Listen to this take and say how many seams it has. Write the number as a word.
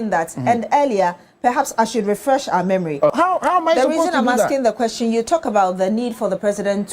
one